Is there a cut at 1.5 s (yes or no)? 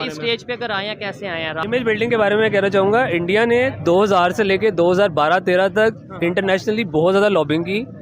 yes